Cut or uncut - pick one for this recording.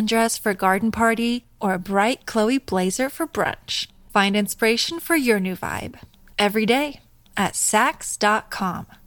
uncut